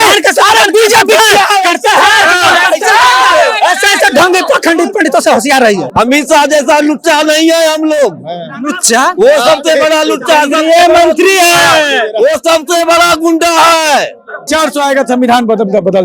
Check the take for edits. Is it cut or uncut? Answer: cut